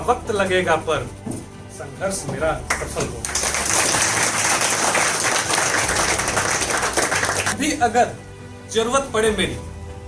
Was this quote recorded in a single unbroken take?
no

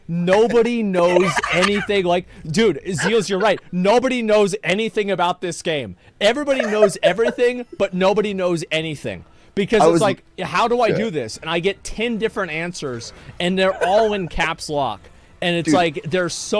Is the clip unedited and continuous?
yes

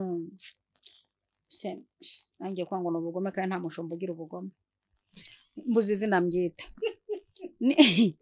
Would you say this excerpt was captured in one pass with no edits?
yes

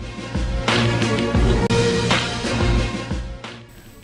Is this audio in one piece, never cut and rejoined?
no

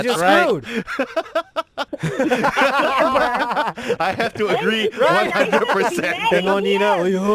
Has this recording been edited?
yes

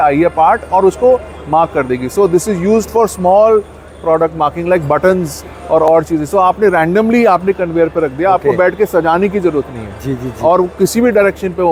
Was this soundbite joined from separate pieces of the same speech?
no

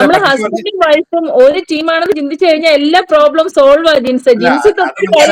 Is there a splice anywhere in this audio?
no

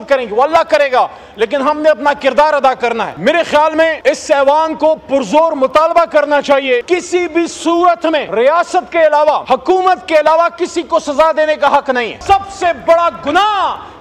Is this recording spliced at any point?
yes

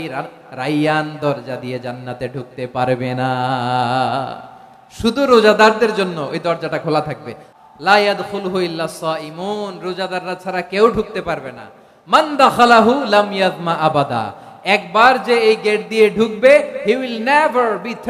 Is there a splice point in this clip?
yes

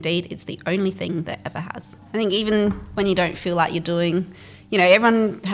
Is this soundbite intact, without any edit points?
no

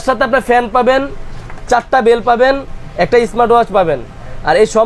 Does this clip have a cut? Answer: no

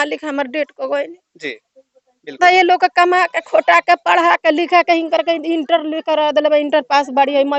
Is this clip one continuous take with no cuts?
yes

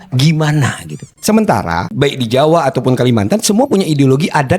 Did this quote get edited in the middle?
yes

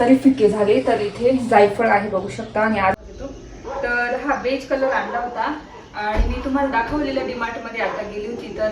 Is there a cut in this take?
yes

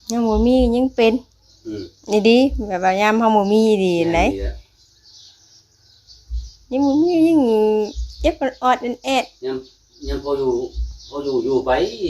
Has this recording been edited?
no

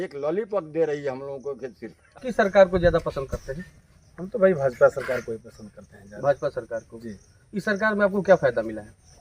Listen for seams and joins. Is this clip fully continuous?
no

